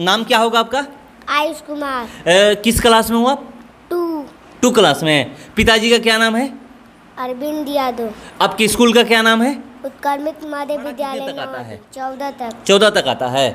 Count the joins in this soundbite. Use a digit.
1